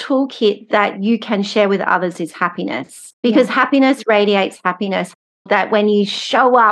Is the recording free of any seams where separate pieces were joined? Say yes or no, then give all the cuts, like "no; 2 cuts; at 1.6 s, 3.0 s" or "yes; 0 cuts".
no; 2 cuts; at 3.0 s, 5.3 s